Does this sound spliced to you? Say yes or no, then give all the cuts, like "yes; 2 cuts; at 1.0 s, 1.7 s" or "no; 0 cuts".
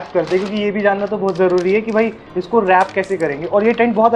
no; 0 cuts